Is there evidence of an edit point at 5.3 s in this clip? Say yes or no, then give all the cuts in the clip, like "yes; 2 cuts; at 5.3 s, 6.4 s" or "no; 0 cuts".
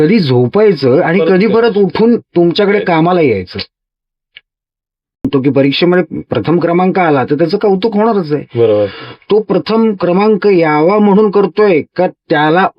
yes; 1 cut; at 5.3 s